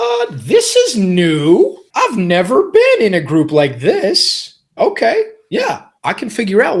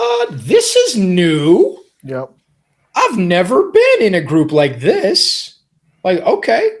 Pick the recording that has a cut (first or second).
first